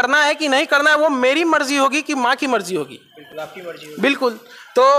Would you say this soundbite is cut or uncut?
uncut